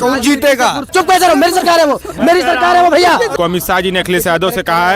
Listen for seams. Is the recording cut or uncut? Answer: cut